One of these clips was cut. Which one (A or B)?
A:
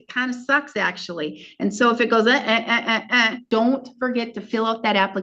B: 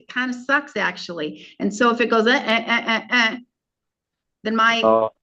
A